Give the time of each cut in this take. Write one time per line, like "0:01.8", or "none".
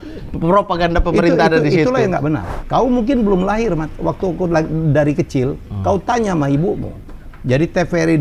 0:02.5